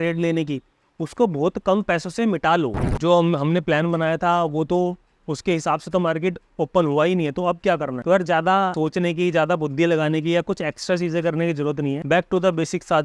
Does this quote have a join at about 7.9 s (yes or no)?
yes